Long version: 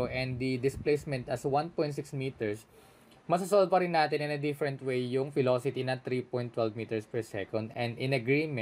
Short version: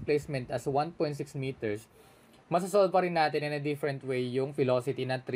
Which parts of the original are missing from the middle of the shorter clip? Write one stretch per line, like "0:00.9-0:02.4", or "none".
none